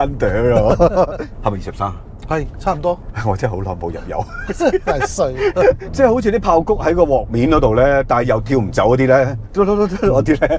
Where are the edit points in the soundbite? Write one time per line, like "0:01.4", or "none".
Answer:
0:01.2
0:05.9